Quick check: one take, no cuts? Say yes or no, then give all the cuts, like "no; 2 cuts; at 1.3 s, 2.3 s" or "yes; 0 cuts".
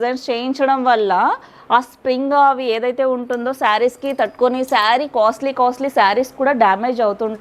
yes; 0 cuts